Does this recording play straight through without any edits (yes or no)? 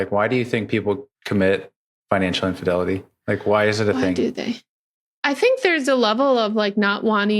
no